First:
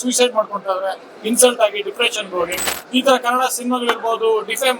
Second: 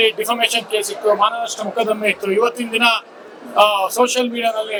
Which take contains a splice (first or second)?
first